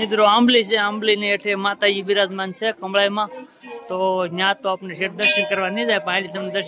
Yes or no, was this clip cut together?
no